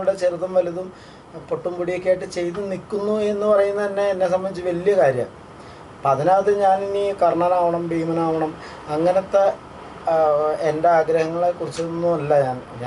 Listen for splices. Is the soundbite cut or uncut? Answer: uncut